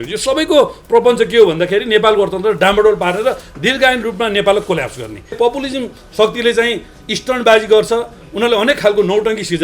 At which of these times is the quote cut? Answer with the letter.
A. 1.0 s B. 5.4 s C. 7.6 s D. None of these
B